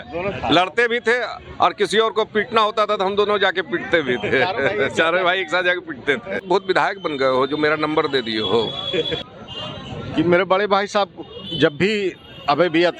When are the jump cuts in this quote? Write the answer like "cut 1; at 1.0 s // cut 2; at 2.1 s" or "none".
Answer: cut 1; at 6.4 s // cut 2; at 9.2 s